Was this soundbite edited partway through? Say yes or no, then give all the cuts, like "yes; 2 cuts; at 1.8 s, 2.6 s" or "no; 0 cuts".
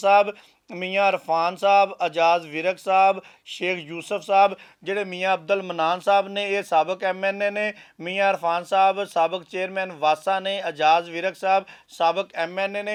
no; 0 cuts